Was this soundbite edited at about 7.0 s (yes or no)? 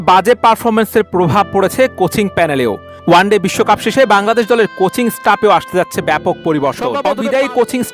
yes